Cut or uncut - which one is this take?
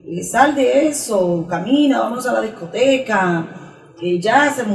uncut